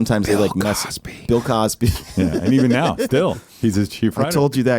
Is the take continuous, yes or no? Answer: yes